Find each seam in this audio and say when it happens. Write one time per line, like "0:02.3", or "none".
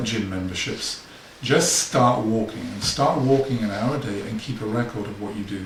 none